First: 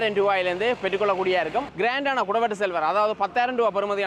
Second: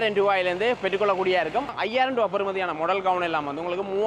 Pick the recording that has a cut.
second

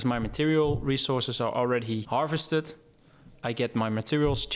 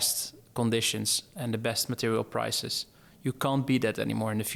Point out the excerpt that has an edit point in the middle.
first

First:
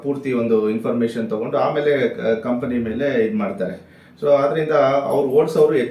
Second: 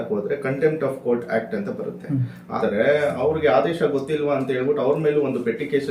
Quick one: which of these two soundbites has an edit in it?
second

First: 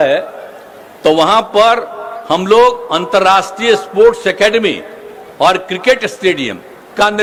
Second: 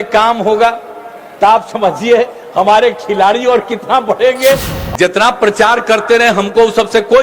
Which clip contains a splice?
second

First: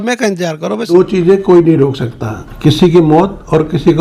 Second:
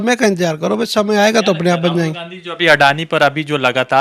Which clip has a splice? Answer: first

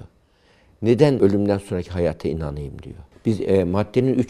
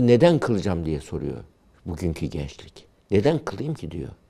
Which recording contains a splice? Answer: first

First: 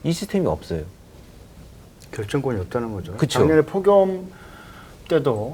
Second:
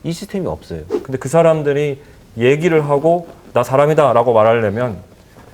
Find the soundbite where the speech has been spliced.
second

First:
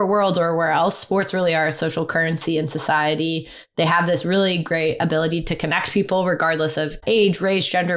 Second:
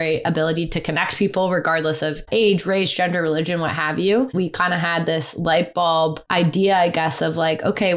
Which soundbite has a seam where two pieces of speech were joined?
second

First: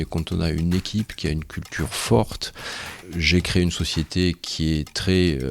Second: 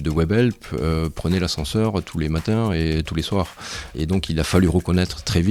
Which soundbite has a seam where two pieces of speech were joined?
first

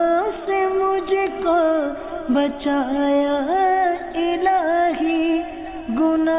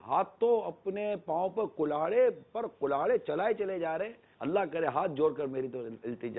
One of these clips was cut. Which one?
second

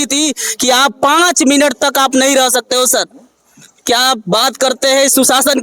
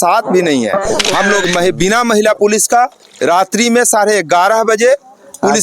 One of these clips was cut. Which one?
second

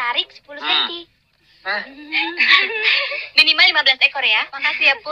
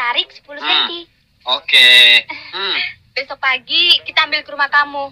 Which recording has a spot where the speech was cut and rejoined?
second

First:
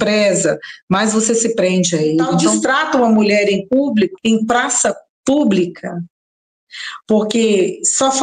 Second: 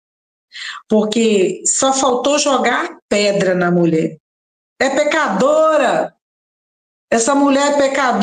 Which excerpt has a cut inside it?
first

